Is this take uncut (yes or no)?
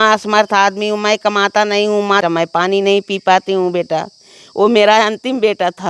no